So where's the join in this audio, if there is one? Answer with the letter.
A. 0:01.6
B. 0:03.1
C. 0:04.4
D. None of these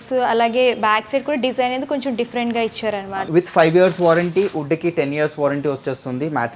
B